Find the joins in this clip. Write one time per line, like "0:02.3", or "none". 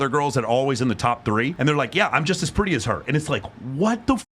0:01.5